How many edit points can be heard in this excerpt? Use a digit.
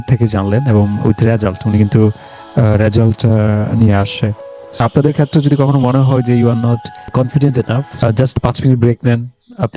3